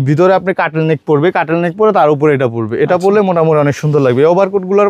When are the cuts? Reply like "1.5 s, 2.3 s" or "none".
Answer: none